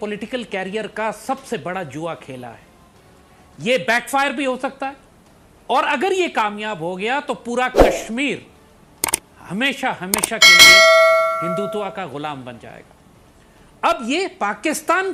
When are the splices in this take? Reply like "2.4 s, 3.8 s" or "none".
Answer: none